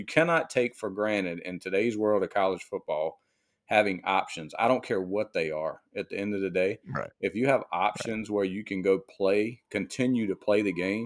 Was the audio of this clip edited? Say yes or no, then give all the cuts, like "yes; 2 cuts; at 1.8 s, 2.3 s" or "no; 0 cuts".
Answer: no; 0 cuts